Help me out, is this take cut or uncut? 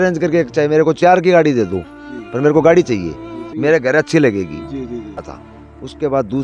cut